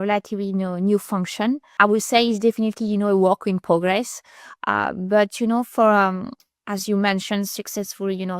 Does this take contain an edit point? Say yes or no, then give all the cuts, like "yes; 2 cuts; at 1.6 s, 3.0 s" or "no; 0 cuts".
yes; 1 cut; at 1.7 s